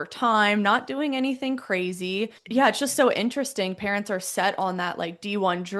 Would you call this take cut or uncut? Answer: cut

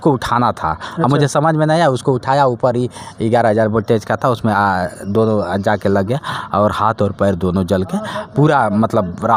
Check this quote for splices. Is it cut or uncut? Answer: uncut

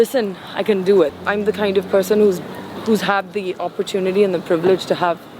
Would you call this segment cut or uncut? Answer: cut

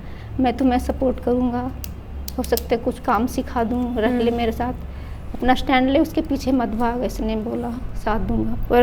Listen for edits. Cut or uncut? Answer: uncut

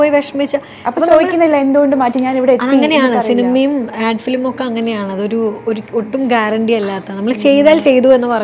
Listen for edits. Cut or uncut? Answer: uncut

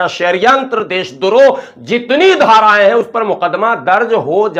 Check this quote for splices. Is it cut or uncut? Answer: uncut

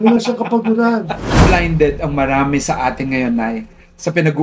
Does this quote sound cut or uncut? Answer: cut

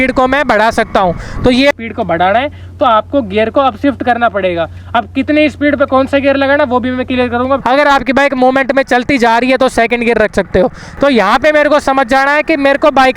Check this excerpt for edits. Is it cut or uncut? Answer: cut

